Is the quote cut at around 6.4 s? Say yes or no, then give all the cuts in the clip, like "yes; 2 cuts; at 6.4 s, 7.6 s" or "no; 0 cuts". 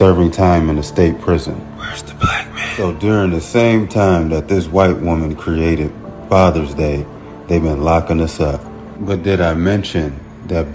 no; 1 cut; at 9.4 s